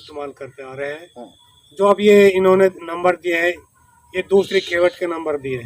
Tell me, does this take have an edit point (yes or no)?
no